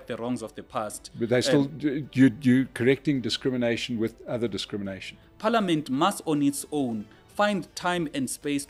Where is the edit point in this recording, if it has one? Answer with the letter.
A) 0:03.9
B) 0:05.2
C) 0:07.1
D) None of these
B